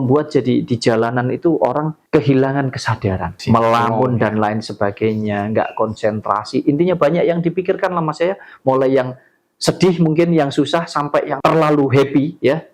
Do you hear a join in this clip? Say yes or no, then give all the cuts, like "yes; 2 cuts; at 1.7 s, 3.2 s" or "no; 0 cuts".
yes; 3 cuts; at 2.0 s, 3.3 s, 11.3 s